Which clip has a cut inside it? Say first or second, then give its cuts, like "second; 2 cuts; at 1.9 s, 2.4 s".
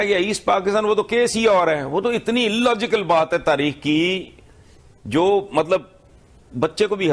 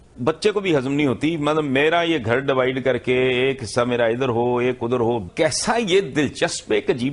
first; 1 cut; at 1.6 s